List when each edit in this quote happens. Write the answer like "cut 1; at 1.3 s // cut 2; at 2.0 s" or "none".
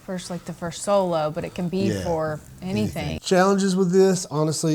none